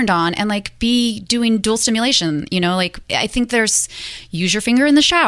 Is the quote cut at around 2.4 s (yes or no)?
no